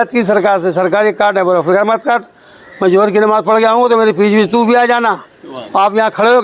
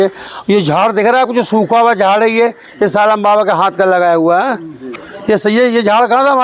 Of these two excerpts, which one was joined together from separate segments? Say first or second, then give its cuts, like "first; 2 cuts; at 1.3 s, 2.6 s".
second; 1 cut; at 4.8 s